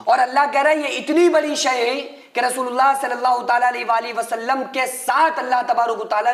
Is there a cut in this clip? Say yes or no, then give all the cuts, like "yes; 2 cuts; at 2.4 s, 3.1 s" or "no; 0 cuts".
no; 0 cuts